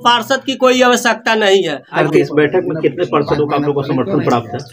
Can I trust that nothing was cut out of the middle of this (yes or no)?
yes